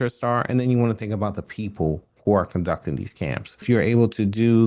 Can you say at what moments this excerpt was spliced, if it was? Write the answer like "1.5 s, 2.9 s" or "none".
3.6 s

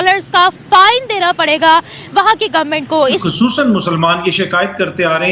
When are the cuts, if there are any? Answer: 3.3 s

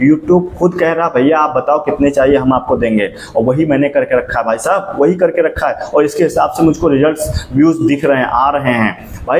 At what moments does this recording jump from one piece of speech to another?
none

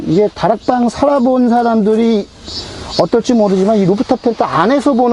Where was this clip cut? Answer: none

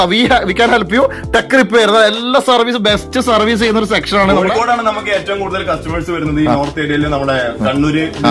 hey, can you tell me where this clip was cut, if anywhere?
4.4 s

